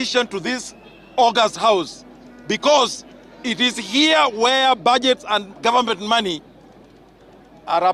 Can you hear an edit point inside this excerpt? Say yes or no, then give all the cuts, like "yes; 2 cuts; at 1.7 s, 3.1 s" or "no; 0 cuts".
no; 0 cuts